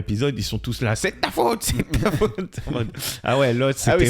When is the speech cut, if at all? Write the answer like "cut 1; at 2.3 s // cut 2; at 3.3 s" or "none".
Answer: none